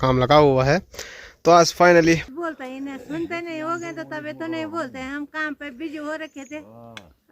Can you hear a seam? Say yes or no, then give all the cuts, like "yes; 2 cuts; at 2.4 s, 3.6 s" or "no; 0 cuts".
yes; 1 cut; at 2.3 s